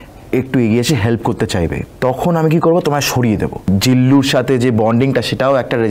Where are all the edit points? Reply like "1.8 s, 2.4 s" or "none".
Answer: 1.8 s, 3.7 s